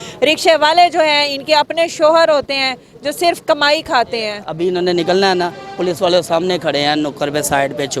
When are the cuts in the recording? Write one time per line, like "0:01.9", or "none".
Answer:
0:04.4

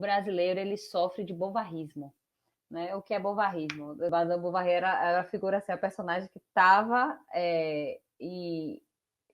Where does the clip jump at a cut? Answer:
0:04.1

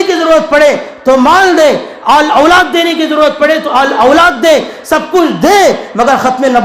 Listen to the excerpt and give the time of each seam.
none

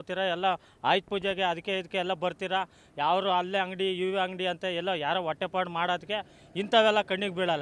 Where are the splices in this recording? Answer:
none

